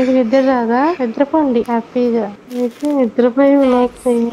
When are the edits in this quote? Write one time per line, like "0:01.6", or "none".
0:02.4